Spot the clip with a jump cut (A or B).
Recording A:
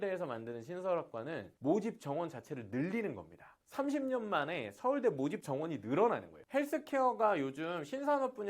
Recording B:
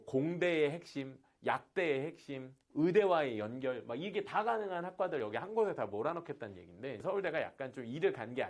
A